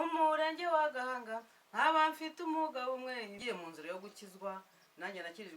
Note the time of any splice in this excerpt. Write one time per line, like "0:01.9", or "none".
0:03.4